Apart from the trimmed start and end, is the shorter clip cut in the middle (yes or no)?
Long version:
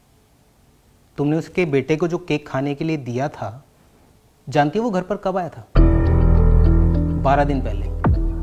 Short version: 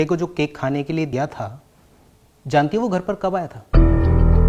yes